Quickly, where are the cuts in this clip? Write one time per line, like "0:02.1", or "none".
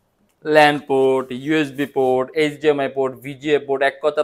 none